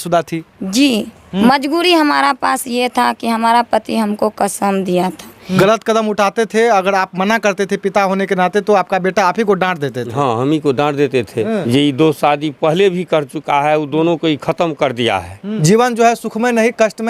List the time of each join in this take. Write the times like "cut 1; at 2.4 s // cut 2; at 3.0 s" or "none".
cut 1; at 1.4 s // cut 2; at 5.6 s // cut 3; at 11.6 s // cut 4; at 15.5 s